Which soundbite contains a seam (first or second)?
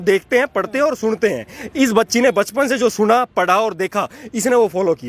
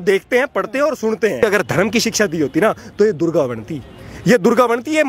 second